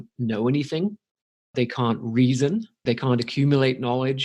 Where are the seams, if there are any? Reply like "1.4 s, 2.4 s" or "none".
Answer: 1.5 s, 2.8 s